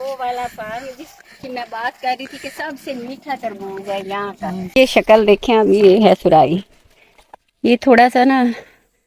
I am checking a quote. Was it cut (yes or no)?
yes